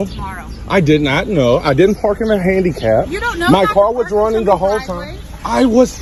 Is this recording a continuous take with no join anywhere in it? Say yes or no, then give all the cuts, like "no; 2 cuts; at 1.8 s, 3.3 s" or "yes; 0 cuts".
yes; 0 cuts